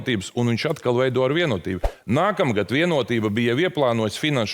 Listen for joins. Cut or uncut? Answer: cut